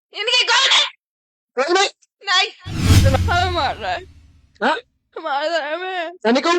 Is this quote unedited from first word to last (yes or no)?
no